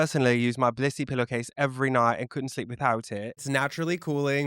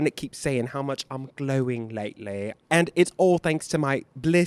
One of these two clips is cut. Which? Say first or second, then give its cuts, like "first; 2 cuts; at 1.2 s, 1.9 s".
first; 1 cut; at 3.4 s